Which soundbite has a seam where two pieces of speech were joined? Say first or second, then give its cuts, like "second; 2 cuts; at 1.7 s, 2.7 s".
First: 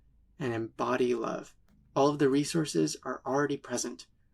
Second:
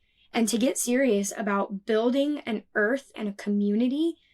second; 1 cut; at 3.2 s